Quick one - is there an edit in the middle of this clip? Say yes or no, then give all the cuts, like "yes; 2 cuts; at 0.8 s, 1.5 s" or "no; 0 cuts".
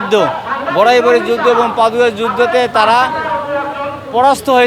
no; 0 cuts